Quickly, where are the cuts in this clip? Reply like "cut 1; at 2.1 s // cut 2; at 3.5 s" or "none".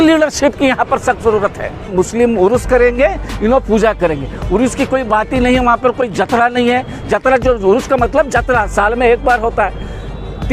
cut 1; at 1.9 s